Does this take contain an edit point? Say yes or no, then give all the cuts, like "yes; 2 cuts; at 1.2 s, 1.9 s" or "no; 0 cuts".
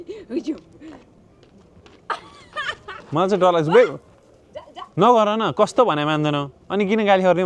no; 0 cuts